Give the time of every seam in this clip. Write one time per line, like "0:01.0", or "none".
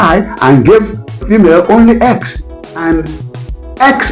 0:01.2